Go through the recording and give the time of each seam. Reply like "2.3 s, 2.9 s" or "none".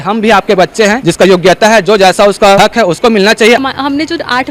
1.0 s, 2.6 s, 3.6 s